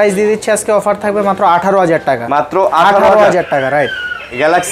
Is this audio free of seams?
yes; 0 cuts

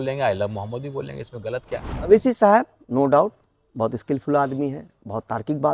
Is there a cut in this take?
yes; 1 cut; at 2.1 s

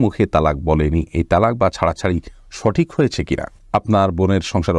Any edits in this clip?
no; 0 cuts

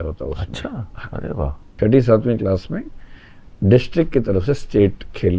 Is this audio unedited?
no; 1 cut; at 1.7 s

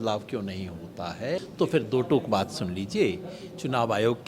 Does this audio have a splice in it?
yes; 1 cut; at 1.5 s

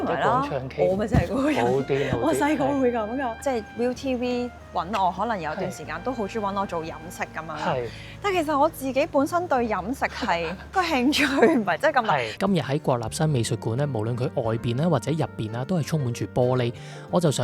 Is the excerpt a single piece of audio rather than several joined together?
no; 3 cuts; at 3.4 s, 10.6 s, 12.4 s

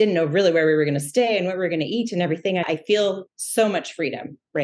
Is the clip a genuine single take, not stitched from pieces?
no; 1 cut; at 2.6 s

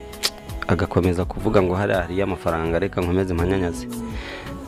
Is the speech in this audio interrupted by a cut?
no; 0 cuts

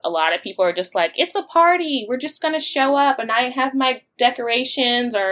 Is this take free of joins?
yes; 0 cuts

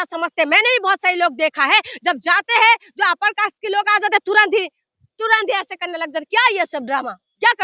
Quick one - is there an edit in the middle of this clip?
no; 0 cuts

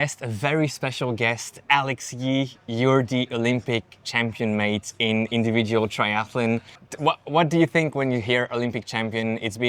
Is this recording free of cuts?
yes; 0 cuts

